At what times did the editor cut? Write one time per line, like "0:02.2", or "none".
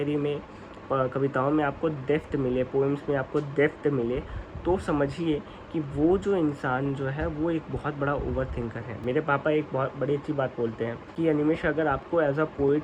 none

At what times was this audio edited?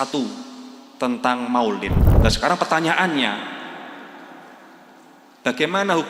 0:02.0

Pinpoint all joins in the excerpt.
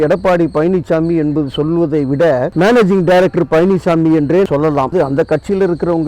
0:04.9

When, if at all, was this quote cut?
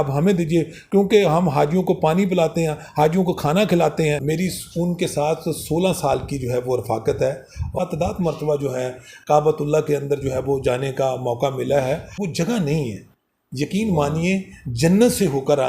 0:04.2
0:07.8
0:12.2

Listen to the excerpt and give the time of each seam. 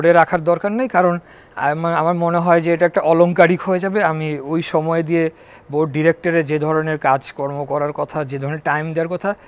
none

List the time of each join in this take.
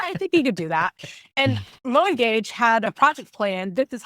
0:02.8

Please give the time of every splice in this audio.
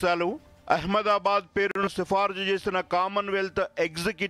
none

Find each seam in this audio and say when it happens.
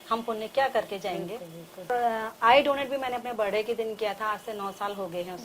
0:01.9

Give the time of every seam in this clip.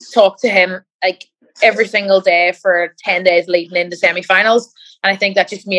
none

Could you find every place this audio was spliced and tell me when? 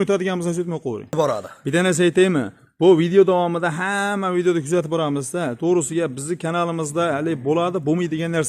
0:01.1

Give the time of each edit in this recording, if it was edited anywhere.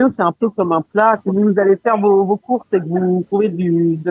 0:01.2
0:03.3

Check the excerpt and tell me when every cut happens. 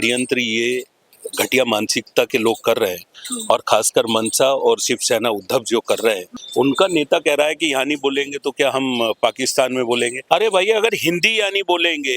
0:06.3
0:10.2

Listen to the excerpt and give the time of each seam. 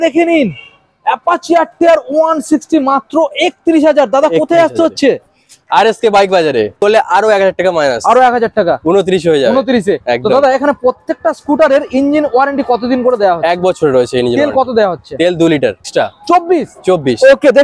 0:06.8
0:15.9

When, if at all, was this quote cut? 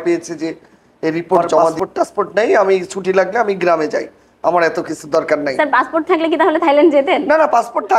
0:01.8

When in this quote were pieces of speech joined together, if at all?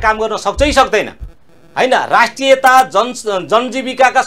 none

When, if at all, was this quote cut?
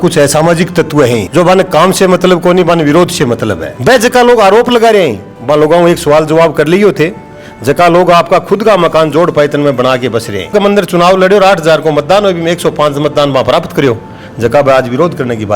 0:03.8
0:10.5

